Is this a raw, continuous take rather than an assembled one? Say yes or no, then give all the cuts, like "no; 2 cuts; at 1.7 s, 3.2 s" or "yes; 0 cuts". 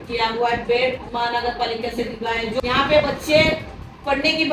no; 1 cut; at 2.6 s